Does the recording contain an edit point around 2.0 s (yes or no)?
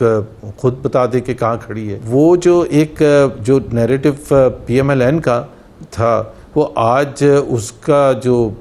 yes